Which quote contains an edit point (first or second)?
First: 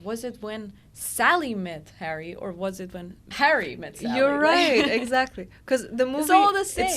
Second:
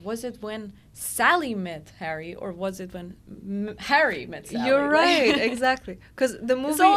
first